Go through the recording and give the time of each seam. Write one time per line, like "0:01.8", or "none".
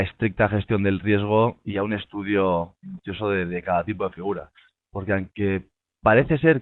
0:05.5